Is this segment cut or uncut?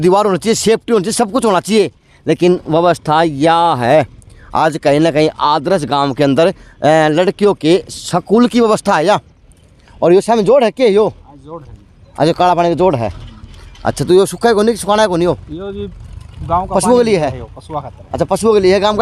uncut